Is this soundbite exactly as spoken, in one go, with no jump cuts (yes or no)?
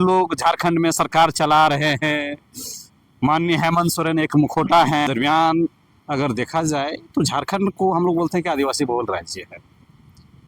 no